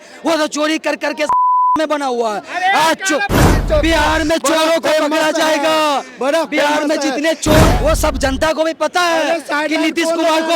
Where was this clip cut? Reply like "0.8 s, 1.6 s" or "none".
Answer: 3.5 s, 7.7 s

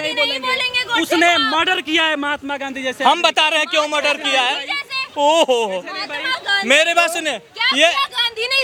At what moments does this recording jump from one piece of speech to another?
none

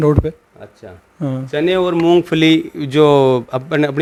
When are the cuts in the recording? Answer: none

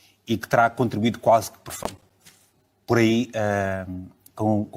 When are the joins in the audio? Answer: none

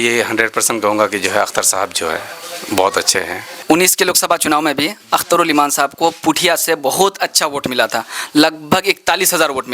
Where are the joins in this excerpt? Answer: 3.5 s

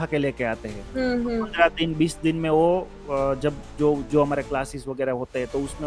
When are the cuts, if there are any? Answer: none

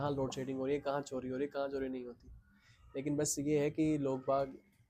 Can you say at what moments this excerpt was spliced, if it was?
none

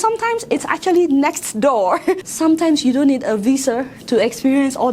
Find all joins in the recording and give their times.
2.2 s

